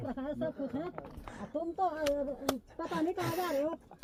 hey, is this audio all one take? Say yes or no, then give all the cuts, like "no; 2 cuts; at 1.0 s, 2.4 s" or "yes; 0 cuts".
yes; 0 cuts